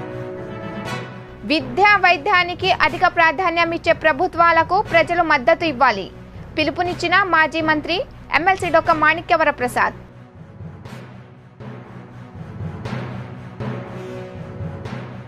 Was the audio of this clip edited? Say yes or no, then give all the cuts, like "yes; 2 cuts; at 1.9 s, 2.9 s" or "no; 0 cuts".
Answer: yes; 1 cut; at 0.9 s